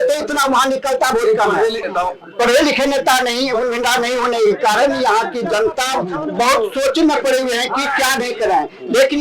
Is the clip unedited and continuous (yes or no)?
no